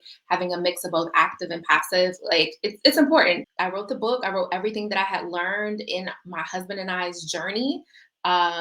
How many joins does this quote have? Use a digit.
1